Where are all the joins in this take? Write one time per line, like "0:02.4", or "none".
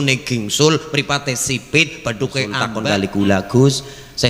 0:02.7